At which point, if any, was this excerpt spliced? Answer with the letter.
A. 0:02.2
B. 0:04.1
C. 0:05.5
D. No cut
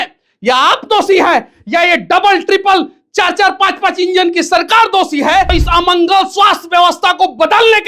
C